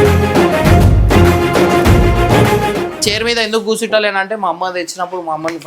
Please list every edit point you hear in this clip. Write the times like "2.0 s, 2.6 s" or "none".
2.9 s